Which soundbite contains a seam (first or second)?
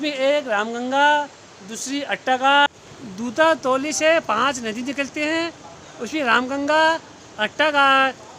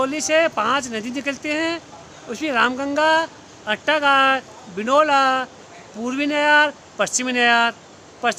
first